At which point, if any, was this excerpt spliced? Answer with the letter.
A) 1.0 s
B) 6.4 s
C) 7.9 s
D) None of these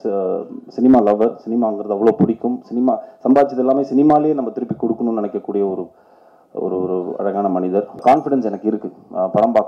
C